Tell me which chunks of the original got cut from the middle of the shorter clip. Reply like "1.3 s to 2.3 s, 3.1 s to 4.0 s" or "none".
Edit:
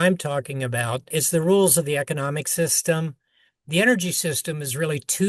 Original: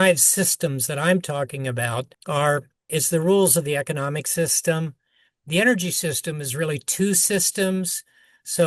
2.0 s to 2.8 s